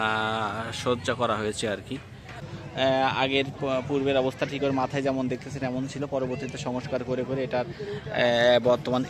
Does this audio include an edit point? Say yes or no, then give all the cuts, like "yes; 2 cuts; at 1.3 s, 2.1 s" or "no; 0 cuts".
yes; 1 cut; at 2.4 s